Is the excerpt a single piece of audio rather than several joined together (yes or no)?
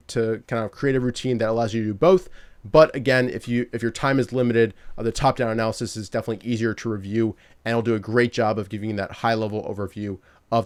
yes